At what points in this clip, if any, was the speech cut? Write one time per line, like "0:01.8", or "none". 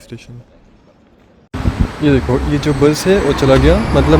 0:01.5